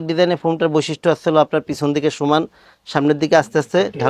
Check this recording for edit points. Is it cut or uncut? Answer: uncut